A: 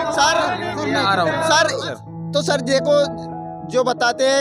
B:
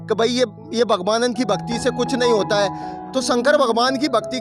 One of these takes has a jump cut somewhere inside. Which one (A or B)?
A